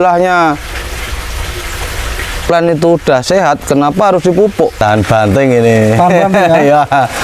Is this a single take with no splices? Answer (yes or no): no